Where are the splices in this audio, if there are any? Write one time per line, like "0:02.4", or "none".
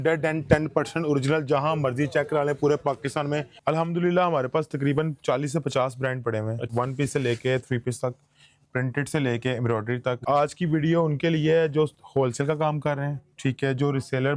0:03.5
0:06.7
0:10.2

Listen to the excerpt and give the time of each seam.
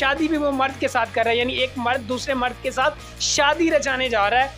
none

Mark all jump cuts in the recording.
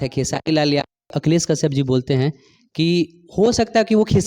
0:01.1

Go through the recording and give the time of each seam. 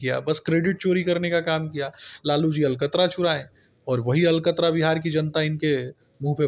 none

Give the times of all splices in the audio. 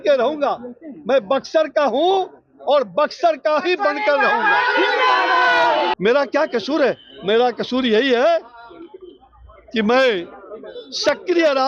0:05.9

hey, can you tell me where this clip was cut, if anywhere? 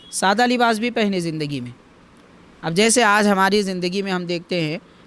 none

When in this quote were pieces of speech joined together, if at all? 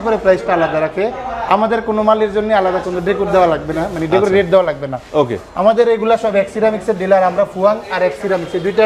none

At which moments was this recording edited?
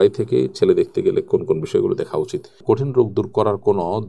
0:02.5

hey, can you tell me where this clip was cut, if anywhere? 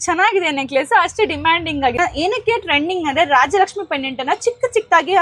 0:01.9

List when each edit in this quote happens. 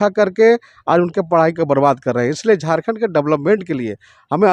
none

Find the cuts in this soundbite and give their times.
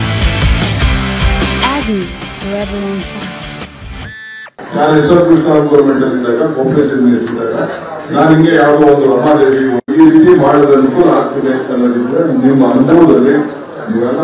0:04.6

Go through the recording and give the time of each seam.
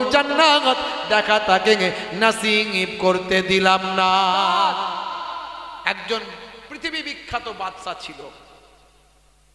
0:04.6

